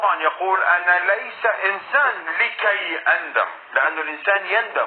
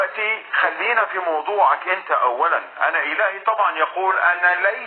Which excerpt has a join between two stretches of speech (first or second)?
second